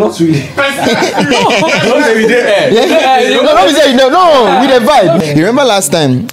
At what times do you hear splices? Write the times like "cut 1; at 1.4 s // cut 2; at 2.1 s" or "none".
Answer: cut 1; at 5.2 s

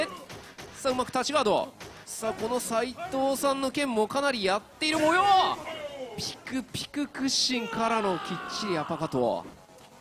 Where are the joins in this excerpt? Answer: none

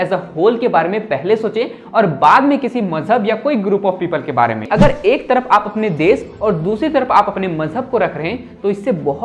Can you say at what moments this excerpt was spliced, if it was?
cut 1; at 4.7 s

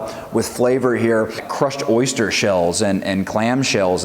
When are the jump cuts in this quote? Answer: cut 1; at 1.5 s

